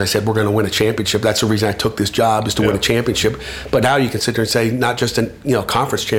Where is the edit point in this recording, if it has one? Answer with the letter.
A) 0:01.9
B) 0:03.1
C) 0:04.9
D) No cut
D